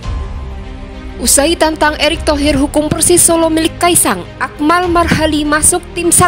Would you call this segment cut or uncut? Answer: cut